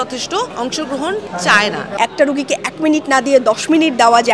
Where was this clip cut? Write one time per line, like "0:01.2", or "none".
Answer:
0:01.9